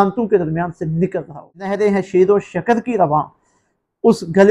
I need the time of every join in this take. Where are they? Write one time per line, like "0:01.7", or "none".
0:01.7